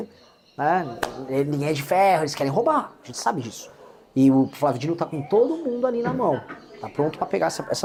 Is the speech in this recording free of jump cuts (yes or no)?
yes